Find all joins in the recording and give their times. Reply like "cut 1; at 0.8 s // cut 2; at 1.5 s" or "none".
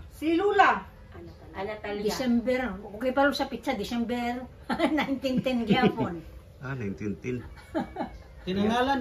none